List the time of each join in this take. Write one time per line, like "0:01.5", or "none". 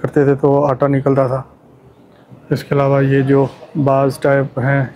none